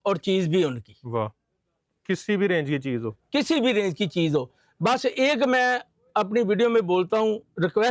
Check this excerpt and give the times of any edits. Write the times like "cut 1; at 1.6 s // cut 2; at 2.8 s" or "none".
none